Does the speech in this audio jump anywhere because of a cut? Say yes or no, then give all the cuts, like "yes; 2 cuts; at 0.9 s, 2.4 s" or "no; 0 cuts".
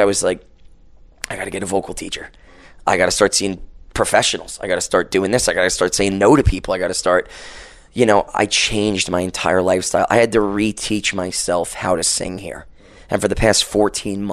no; 0 cuts